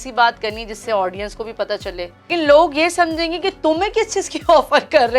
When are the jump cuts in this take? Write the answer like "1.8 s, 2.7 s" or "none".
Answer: 2.3 s

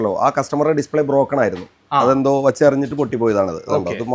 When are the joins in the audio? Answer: none

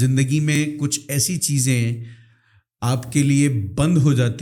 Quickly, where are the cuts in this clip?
none

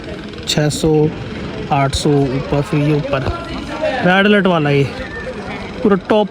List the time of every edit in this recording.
none

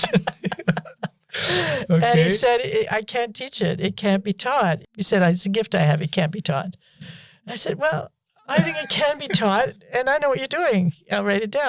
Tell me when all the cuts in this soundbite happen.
4.9 s

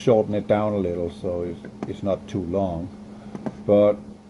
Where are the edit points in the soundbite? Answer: 1.6 s

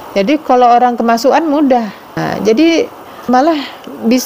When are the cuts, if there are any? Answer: 2.2 s, 3.3 s

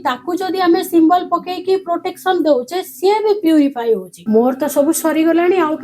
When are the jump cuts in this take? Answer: 4.1 s

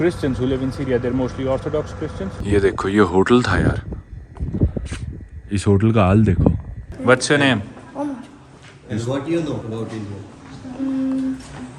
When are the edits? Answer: 2.4 s, 6.9 s, 9.6 s

